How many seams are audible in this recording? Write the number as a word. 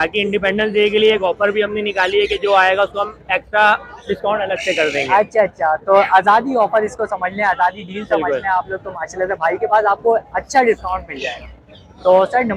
zero